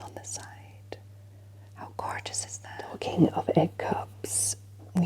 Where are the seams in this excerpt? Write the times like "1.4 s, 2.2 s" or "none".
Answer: 2.9 s